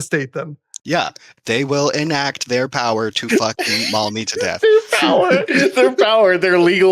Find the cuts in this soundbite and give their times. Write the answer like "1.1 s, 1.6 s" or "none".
1.2 s